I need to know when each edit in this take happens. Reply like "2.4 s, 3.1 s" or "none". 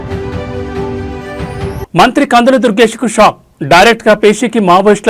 1.8 s